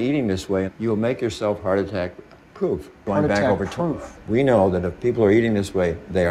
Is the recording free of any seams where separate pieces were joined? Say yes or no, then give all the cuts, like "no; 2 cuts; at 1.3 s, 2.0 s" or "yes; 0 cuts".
yes; 0 cuts